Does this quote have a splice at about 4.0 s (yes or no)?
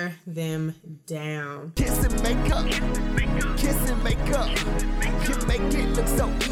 no